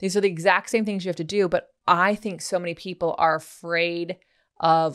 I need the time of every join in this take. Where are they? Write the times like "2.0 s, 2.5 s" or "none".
1.7 s